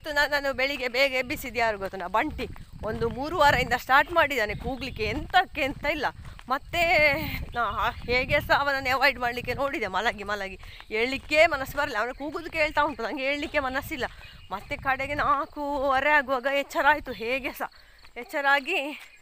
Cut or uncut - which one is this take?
uncut